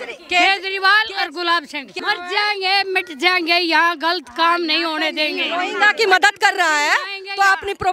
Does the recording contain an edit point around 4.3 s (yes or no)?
no